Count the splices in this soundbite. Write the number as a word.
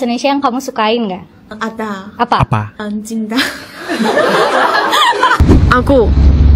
one